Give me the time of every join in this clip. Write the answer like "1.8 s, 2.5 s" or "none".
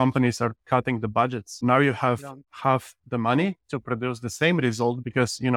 1.6 s

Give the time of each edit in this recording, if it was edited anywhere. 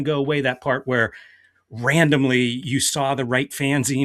none

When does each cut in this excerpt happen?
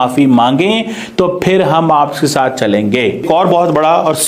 3.2 s

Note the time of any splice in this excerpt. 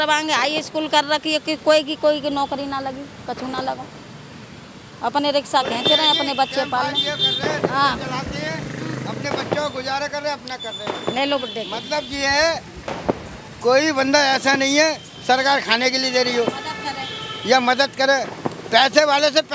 none

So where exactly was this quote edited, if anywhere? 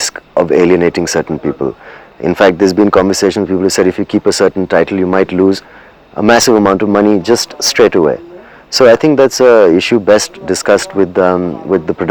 none

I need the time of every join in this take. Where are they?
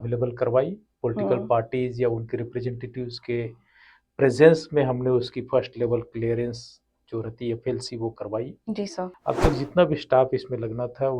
9.2 s

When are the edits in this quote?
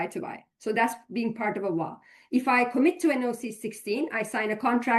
none

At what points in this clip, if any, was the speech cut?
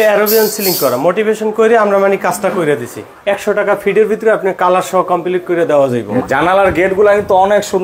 3.1 s, 6.2 s

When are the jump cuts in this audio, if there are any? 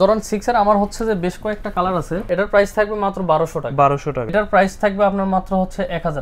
2.2 s, 4.3 s

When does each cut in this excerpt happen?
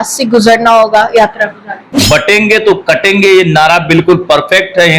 1.9 s

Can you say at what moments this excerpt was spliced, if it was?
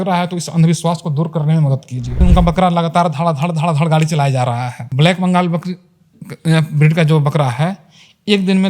2.2 s, 4.8 s

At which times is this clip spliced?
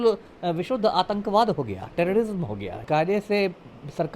2.8 s

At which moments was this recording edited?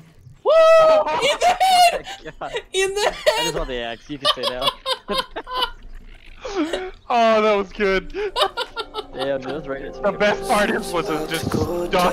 none

